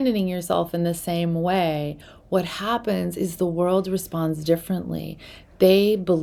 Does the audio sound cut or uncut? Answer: uncut